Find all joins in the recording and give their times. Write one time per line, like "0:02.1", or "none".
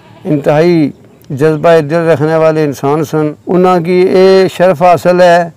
0:03.4